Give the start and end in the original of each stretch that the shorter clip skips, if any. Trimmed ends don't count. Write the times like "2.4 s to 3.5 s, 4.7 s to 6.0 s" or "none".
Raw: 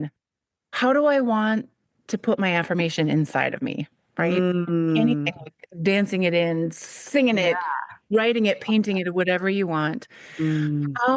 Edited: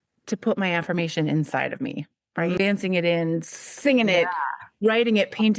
4.4 s to 5.9 s